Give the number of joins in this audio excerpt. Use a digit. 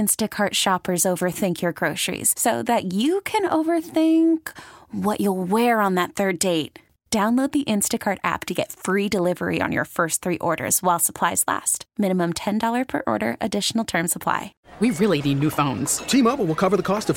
1